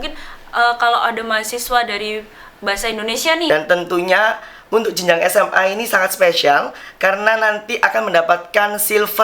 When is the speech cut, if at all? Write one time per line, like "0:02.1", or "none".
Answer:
0:03.5